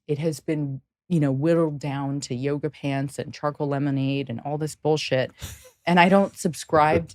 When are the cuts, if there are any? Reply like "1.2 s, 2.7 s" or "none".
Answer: none